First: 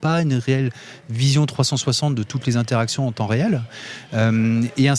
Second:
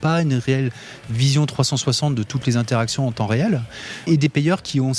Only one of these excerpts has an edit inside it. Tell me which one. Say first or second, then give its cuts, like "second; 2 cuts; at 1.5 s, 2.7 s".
second; 1 cut; at 4.1 s